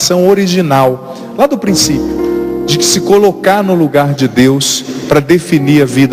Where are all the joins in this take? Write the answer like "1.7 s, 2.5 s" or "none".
none